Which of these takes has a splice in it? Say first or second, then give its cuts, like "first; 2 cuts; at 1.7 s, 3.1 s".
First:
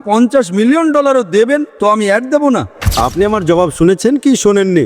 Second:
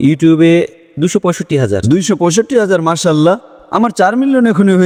first; 1 cut; at 2.8 s